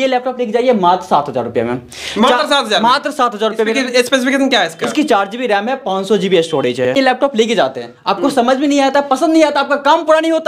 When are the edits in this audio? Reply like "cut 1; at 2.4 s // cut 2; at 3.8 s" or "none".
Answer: cut 1; at 6.9 s